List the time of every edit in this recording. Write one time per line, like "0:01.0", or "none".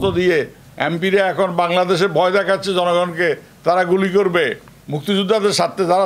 none